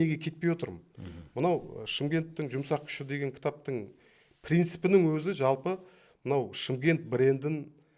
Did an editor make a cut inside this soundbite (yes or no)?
no